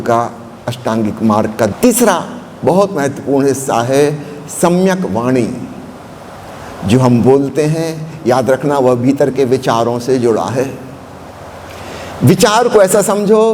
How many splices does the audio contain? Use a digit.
1